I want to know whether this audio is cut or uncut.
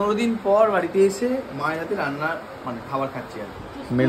uncut